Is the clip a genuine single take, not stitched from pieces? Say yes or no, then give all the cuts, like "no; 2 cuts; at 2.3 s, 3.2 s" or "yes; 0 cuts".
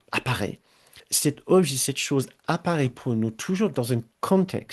no; 1 cut; at 1.1 s